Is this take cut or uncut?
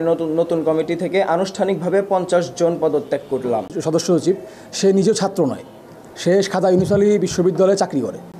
uncut